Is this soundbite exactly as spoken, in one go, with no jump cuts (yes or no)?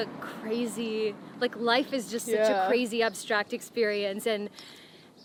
yes